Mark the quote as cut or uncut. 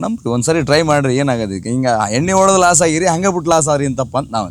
uncut